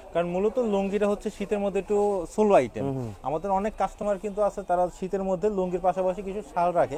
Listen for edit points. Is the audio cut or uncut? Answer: uncut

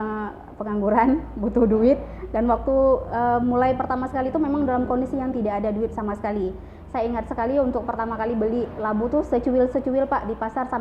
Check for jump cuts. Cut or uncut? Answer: uncut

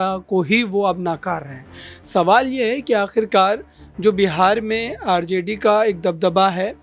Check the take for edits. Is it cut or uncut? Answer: uncut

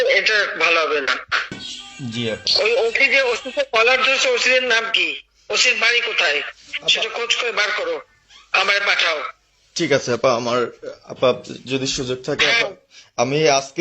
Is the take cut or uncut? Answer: cut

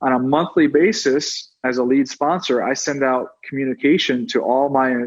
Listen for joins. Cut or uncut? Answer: cut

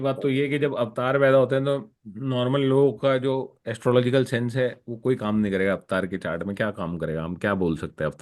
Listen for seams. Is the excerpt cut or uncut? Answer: uncut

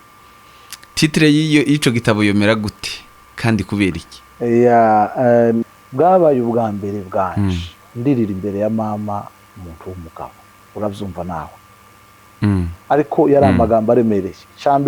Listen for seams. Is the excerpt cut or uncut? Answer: cut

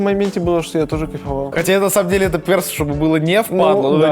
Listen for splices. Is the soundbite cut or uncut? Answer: cut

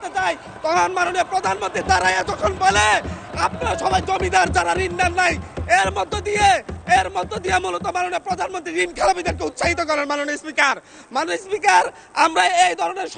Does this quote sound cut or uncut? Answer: uncut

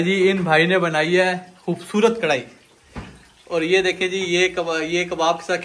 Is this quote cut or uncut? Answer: uncut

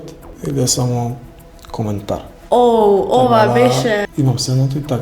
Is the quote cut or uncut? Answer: cut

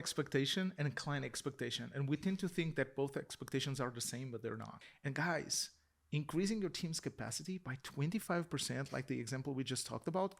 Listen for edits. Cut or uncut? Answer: cut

